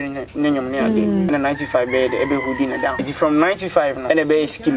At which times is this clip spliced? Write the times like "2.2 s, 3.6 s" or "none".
1.3 s, 3.0 s, 4.0 s